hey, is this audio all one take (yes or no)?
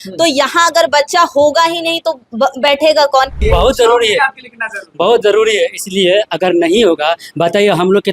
no